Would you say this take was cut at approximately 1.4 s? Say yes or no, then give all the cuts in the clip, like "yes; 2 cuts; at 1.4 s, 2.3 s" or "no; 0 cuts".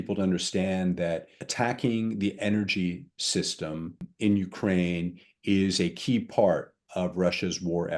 yes; 2 cuts; at 1.4 s, 4.1 s